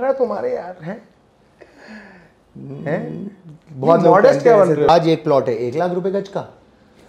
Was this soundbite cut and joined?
yes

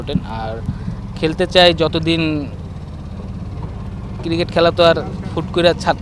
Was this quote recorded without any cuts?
yes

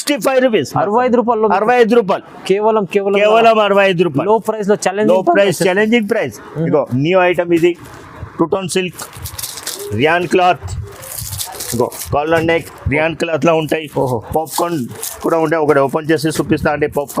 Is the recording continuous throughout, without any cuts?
yes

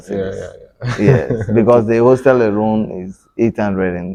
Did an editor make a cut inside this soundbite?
no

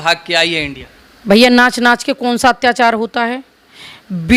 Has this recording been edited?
no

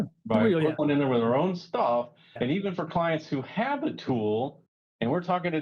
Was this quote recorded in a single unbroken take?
no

